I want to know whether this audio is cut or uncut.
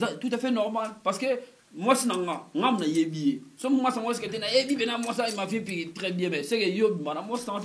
uncut